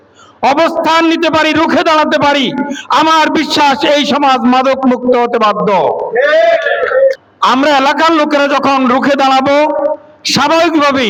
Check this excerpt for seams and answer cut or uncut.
uncut